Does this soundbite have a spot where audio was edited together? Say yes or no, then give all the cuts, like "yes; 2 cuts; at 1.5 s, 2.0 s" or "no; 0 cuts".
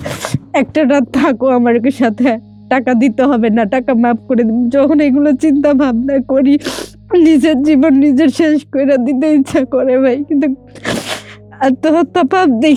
no; 0 cuts